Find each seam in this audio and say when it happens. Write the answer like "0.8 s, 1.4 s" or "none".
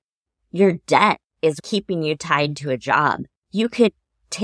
1.6 s